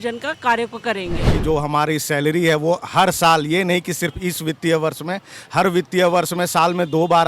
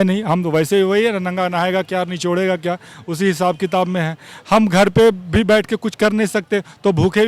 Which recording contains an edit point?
first; 1 cut; at 1.3 s

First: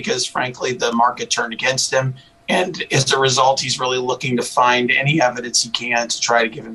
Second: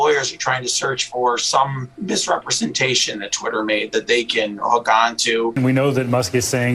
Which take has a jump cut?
second; 2 cuts; at 1.9 s, 5.5 s

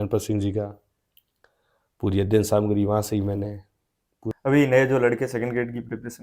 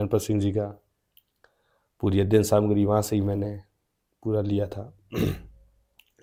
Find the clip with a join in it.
first; 1 cut; at 4.3 s

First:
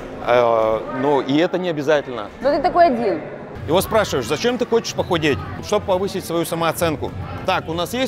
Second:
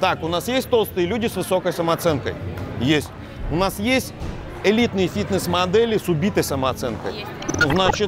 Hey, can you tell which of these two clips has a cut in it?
first; 2 cuts; at 3.5 s, 5.6 s

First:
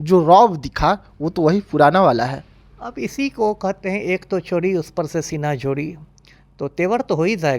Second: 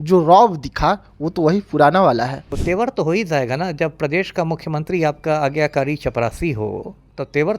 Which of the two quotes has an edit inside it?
second; 1 cut; at 2.5 s

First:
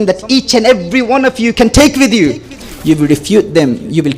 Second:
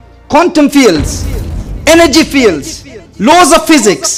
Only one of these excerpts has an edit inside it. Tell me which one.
first; 1 cut; at 2.6 s

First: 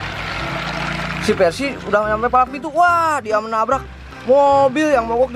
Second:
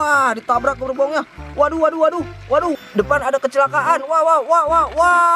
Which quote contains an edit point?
second; 1 cut; at 2.8 s

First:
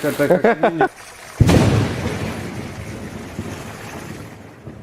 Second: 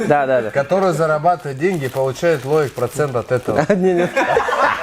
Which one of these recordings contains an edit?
first; 1 cut; at 1.0 s

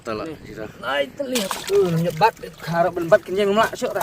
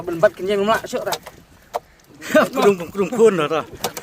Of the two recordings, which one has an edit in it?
first; 1 cut; at 1.6 s

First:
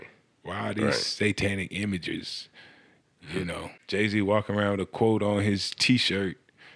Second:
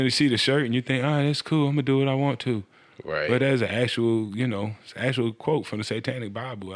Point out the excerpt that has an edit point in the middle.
first; 1 cut; at 3.8 s

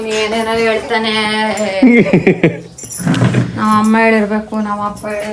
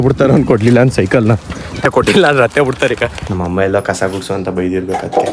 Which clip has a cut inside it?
second; 2 cuts; at 1.9 s, 3.2 s

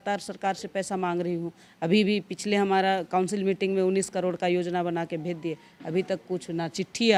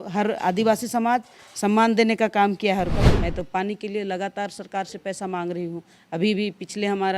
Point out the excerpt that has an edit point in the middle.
second; 1 cut; at 2.9 s

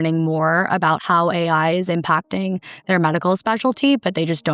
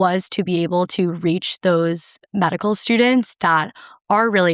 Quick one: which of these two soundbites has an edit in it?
first; 1 cut; at 1.0 s

